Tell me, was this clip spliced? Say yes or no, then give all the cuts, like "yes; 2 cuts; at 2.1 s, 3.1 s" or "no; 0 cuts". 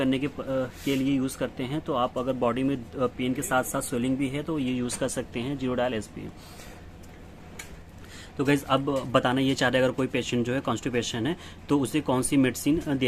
no; 0 cuts